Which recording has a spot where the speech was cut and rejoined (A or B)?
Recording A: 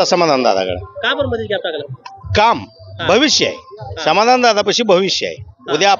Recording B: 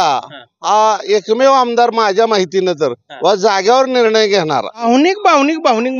B